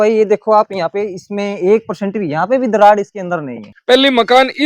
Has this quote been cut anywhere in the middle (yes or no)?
yes